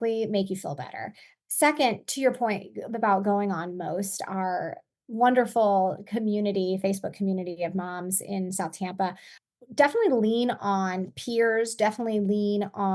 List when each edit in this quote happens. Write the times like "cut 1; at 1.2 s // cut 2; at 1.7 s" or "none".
cut 1; at 1.3 s // cut 2; at 9.3 s